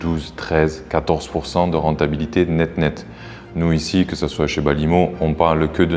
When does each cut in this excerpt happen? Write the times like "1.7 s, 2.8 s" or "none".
none